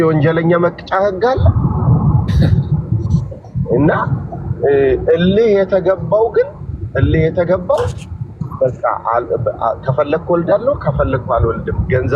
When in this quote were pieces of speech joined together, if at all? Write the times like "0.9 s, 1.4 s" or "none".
none